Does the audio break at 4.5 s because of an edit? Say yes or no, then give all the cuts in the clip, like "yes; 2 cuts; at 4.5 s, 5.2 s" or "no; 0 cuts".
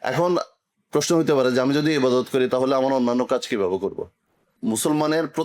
yes; 1 cut; at 4.5 s